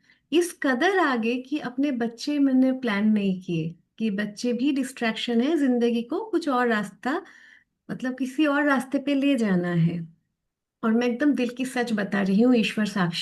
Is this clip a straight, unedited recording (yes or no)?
yes